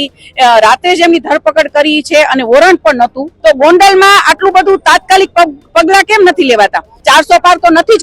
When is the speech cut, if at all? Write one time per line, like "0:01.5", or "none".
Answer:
0:03.3
0:06.9